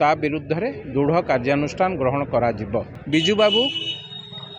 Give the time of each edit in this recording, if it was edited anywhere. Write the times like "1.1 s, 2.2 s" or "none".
3.0 s